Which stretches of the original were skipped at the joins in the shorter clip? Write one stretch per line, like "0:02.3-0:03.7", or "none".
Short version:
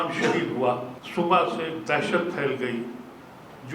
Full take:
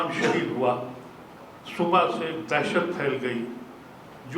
0:00.9-0:01.6